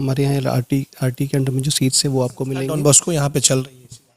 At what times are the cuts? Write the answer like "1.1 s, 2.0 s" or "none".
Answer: 2.6 s